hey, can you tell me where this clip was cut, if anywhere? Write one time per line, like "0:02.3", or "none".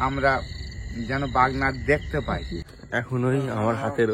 0:02.6